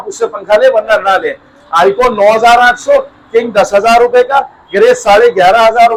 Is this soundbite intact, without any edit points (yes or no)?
yes